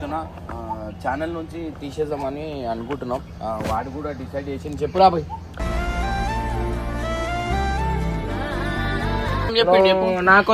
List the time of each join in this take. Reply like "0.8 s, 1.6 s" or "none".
9.5 s